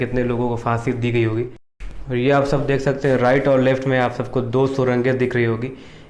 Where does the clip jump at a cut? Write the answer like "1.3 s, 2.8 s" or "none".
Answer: none